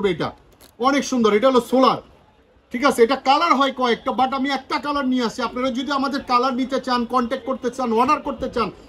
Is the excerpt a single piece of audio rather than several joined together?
yes; 0 cuts

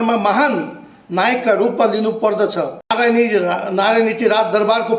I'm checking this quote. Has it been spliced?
yes; 1 cut; at 2.8 s

